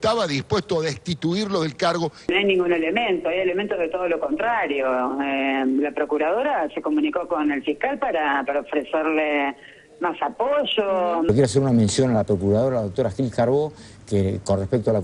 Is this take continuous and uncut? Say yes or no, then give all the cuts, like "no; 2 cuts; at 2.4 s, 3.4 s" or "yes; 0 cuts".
no; 2 cuts; at 2.2 s, 11.3 s